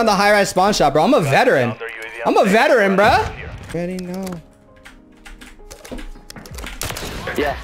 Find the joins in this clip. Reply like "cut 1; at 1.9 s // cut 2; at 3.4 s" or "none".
cut 1; at 3.7 s